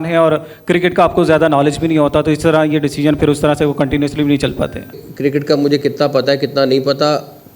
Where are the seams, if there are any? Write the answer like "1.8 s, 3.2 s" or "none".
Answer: 4.9 s

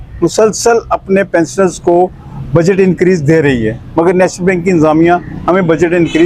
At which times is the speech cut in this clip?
none

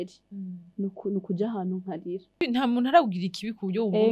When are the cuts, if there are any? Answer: 2.4 s

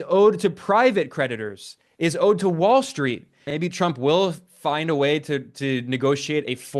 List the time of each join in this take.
3.5 s

